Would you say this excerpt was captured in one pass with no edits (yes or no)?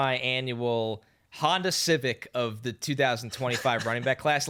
yes